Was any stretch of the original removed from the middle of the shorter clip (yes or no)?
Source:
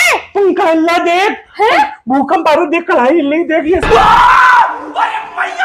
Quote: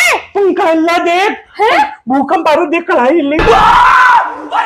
yes